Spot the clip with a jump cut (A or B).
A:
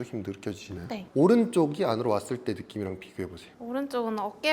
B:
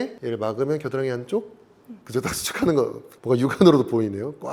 A